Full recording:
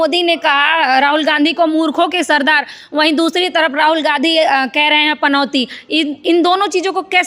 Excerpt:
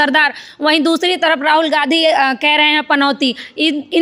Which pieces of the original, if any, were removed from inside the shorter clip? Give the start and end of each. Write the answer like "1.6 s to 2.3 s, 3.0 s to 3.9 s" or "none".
none